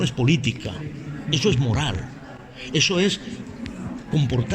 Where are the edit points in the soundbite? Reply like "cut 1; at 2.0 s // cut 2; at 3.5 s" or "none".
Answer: none